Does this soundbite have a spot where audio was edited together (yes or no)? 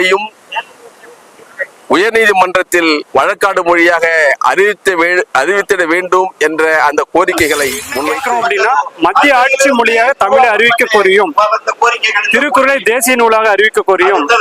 yes